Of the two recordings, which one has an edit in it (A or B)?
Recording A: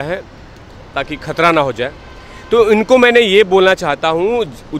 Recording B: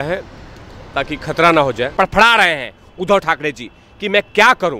B